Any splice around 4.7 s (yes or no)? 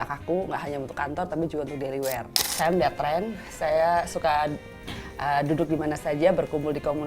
no